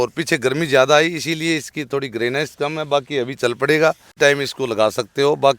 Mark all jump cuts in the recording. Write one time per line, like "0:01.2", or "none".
0:04.2